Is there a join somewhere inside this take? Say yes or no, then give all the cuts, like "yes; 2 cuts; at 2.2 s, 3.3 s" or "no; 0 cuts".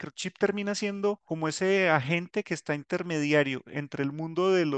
yes; 1 cut; at 1.3 s